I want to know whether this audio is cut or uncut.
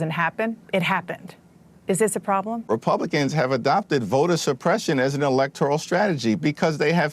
cut